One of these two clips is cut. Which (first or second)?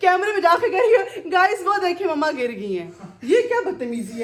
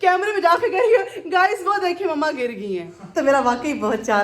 second